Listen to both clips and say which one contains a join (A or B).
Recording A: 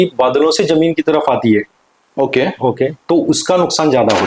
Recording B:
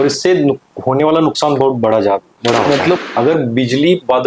B